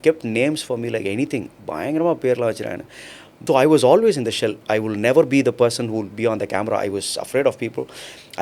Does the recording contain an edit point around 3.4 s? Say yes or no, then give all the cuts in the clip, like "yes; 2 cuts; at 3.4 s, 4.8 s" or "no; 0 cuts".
yes; 1 cut; at 3.4 s